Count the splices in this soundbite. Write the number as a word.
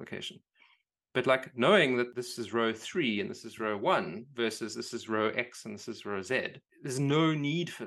one